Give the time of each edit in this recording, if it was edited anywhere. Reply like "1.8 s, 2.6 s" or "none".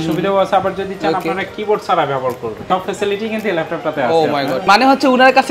2.6 s, 4.7 s